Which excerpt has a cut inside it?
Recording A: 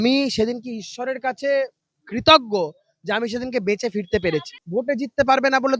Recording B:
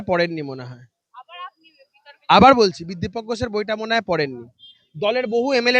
A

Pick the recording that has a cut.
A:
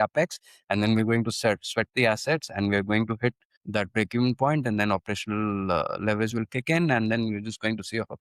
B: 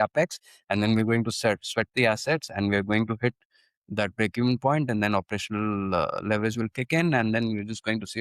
A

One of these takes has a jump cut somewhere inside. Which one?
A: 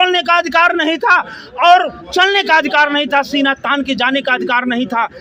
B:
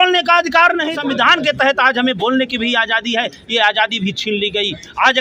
B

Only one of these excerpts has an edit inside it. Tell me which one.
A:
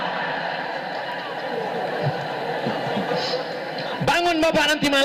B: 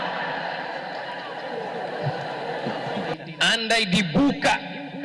B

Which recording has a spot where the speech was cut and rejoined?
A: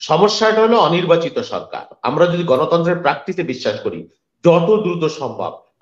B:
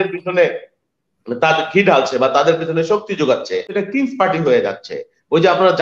B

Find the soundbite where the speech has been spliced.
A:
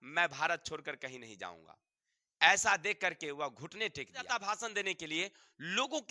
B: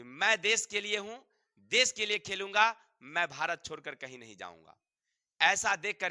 A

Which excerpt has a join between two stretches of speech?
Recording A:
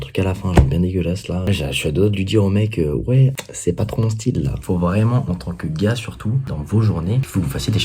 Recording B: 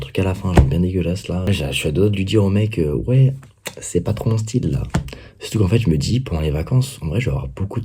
A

